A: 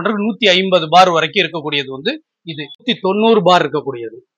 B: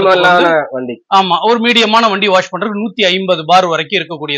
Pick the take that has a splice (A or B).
A